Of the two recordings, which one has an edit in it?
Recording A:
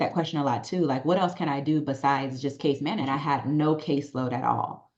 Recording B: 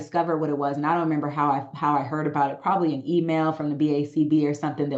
A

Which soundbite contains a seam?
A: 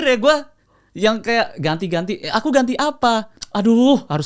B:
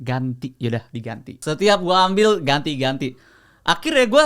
B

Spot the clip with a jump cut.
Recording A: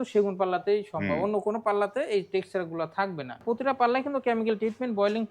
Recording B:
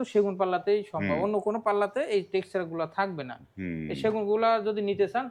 A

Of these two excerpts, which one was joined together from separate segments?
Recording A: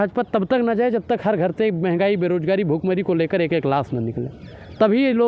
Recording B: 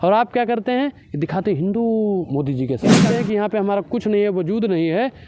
B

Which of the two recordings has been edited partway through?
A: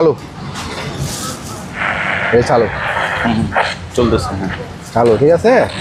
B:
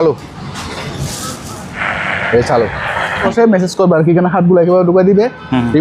B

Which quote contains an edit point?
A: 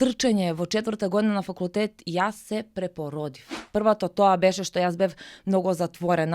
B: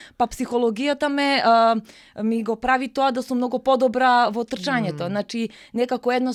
A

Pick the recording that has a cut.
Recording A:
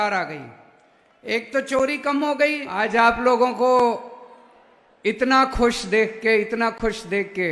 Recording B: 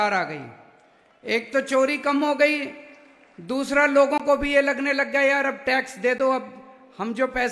A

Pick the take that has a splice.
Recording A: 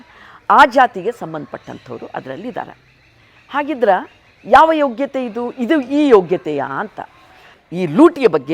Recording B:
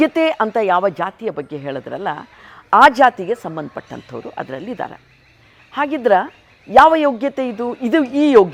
A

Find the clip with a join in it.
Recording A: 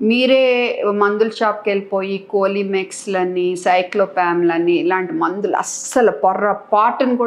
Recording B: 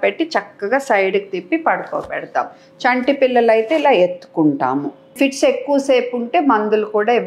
B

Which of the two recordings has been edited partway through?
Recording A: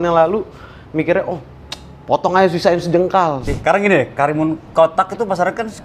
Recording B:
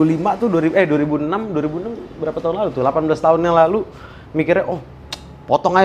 A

